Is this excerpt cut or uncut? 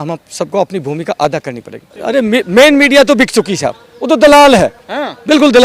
cut